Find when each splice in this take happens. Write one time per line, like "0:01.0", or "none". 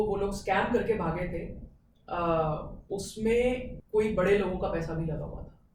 0:03.7